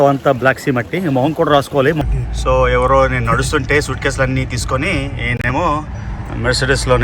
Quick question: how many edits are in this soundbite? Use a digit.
1